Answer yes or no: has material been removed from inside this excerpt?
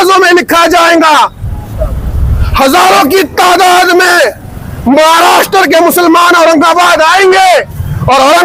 no